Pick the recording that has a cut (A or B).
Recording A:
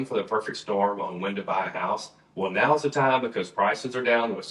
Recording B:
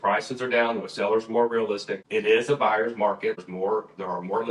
B